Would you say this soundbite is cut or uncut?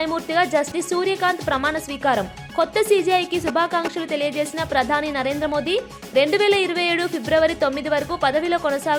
uncut